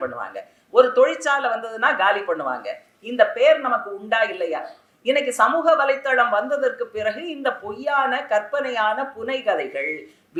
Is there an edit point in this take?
no; 0 cuts

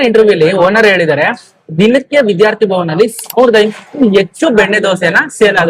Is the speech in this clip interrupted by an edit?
no; 0 cuts

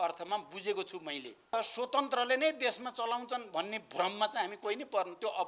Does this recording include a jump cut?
yes; 1 cut; at 1.5 s

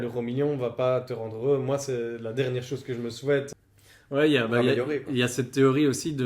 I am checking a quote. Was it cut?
yes; 1 cut; at 3.6 s

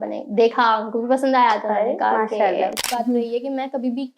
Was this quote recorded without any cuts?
no; 1 cut; at 2.9 s

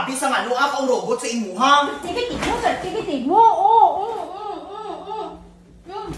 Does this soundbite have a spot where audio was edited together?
yes; 1 cut; at 2.0 s

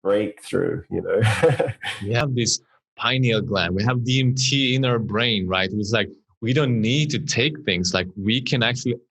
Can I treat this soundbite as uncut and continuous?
no; 1 cut; at 2.2 s

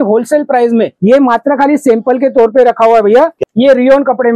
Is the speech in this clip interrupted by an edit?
yes; 2 cuts; at 0.9 s, 3.4 s

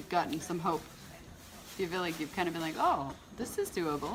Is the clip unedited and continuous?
yes; 0 cuts

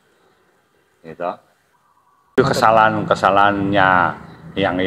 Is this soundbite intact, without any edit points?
no; 1 cut; at 2.4 s

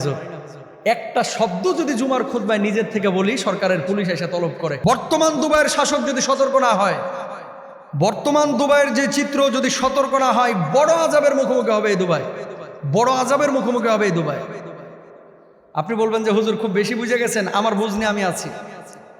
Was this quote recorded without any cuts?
no; 1 cut; at 4.8 s

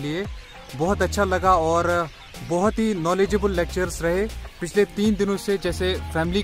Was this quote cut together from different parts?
no; 0 cuts

